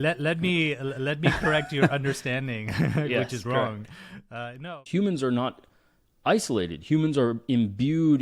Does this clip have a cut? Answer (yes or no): yes